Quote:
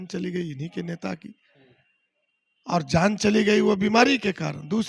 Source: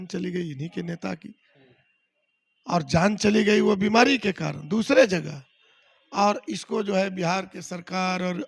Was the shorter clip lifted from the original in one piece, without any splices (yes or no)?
yes